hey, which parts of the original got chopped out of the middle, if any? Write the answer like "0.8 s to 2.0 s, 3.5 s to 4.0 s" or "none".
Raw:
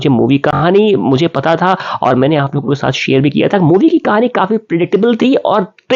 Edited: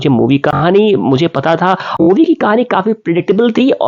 2.0 s to 3.7 s